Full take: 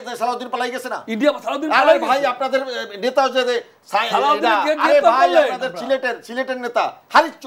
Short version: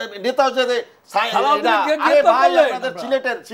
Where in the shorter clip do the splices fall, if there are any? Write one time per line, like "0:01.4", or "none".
none